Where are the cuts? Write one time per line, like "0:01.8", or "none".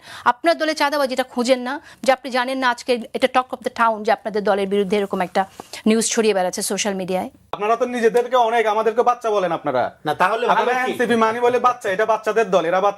0:07.6